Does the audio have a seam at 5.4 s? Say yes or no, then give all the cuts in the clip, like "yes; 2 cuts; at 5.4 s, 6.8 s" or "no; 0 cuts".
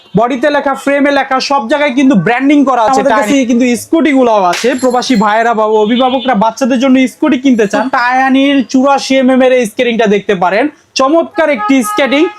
no; 2 cuts; at 2.9 s, 7.9 s